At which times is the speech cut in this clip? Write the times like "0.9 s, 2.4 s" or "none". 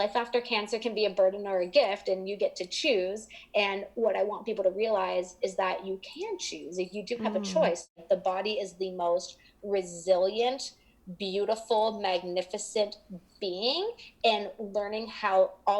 8.0 s